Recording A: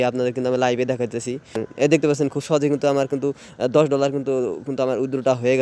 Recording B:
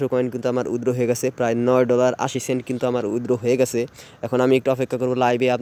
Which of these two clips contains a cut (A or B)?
A